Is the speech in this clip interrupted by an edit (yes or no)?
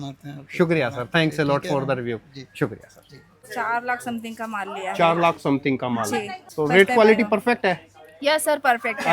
yes